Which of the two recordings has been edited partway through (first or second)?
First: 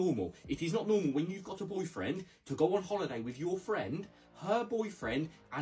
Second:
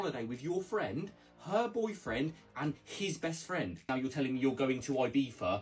second